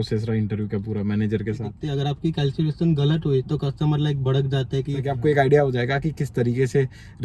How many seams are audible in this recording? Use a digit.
2